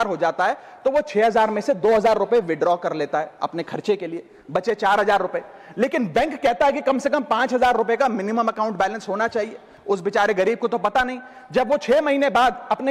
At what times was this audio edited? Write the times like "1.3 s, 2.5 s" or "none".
none